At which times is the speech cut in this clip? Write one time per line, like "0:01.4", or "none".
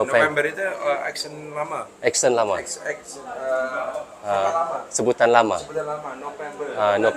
none